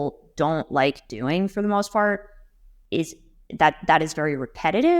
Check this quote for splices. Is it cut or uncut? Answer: uncut